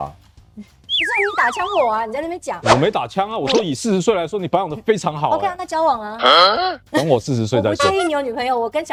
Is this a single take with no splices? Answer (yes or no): yes